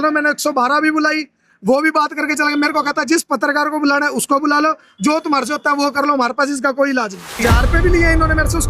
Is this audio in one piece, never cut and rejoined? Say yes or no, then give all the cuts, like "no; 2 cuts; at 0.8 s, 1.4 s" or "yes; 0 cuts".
no; 1 cut; at 7.4 s